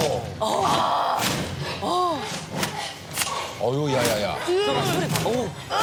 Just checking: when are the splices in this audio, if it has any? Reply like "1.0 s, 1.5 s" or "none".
none